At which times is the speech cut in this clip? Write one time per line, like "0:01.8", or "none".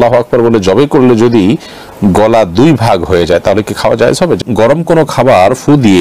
0:04.4